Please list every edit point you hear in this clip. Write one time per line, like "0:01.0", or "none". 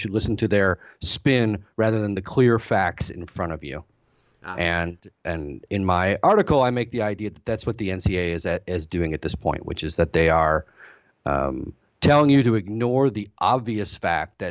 none